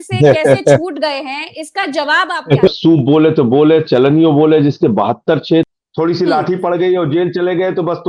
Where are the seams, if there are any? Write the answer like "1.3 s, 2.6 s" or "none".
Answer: 2.7 s, 5.7 s